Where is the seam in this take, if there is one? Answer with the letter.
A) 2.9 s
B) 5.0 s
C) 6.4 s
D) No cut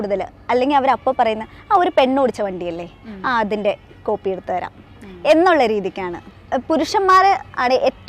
D